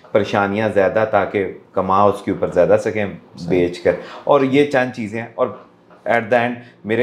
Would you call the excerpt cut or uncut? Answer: uncut